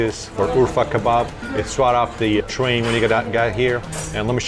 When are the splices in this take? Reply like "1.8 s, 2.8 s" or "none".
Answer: none